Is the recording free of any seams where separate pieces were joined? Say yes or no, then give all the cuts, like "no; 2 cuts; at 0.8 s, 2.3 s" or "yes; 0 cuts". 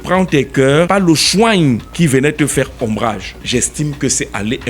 no; 3 cuts; at 0.9 s, 1.9 s, 3.3 s